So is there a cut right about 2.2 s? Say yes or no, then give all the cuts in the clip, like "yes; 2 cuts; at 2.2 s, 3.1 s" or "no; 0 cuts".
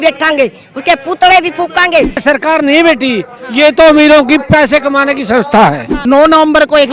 yes; 2 cuts; at 2.2 s, 5.9 s